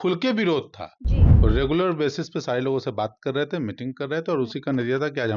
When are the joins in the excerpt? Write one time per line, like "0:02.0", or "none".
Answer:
0:01.3